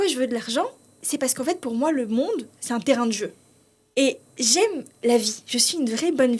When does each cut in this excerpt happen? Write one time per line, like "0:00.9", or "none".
0:01.0